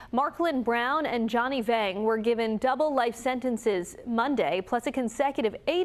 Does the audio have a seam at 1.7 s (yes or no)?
no